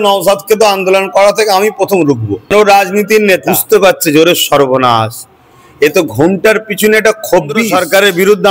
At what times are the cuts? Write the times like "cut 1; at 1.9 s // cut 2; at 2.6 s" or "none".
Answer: cut 1; at 2.5 s // cut 2; at 3.5 s // cut 3; at 7.7 s

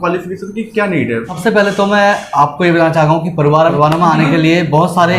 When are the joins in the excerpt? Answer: cut 1; at 1.3 s // cut 2; at 3.7 s

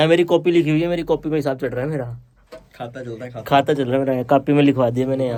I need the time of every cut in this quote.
none

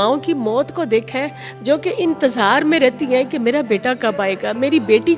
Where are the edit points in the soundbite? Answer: none

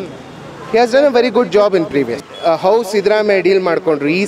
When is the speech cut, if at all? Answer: cut 1; at 2.3 s

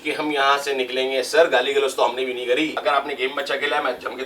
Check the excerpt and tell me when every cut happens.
cut 1; at 2.8 s

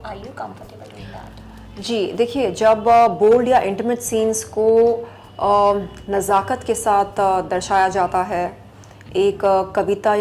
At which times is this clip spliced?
none

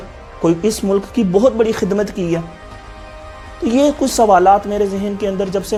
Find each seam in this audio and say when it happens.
none

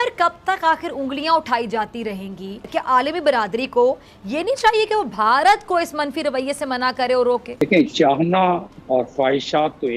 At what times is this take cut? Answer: cut 1; at 2.6 s // cut 2; at 7.6 s

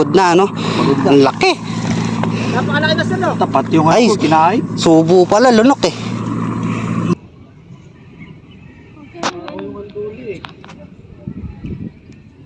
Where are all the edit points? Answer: cut 1; at 7.1 s

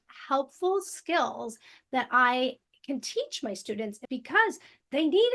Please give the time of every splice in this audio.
cut 1; at 4.0 s

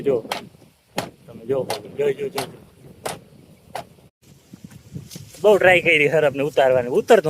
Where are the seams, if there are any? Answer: cut 1; at 4.0 s

